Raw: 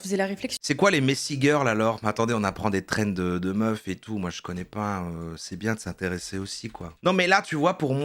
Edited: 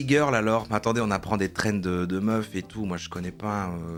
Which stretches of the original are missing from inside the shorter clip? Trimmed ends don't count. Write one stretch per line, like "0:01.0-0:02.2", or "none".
none

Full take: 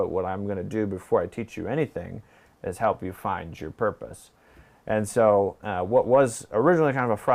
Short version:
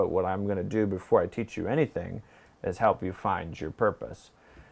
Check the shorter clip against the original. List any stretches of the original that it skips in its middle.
none

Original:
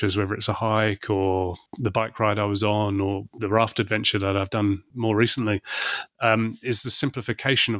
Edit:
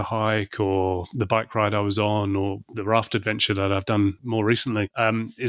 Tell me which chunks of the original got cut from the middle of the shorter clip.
0:01.6-0:01.7
0:05.0-0:05.6

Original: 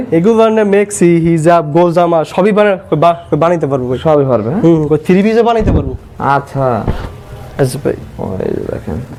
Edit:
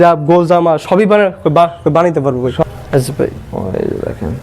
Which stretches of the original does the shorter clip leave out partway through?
0:04.1-0:07.3

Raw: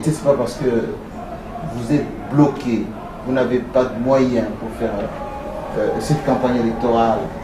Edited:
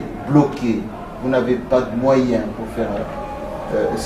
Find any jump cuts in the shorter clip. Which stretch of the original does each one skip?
none

